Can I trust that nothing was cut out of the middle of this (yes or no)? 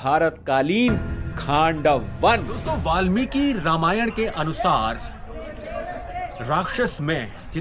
yes